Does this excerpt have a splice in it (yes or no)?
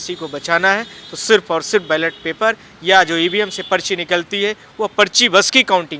no